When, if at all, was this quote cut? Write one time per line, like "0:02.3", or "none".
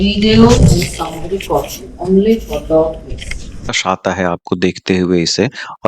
0:03.7